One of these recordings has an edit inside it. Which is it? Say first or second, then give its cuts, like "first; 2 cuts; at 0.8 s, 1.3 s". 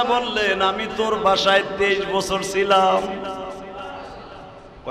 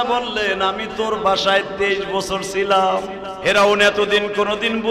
second; 1 cut; at 3.2 s